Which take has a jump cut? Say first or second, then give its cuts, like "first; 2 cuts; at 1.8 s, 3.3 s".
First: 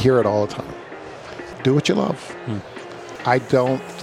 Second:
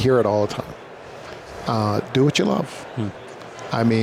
first; 2 cuts; at 1.6 s, 3.1 s